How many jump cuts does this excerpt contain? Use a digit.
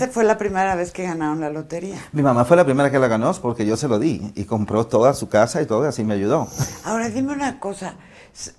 1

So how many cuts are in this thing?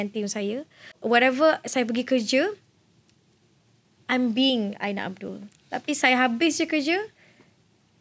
1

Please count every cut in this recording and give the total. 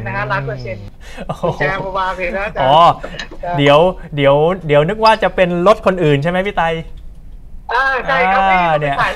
1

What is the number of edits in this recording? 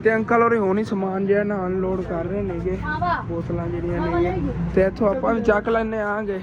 0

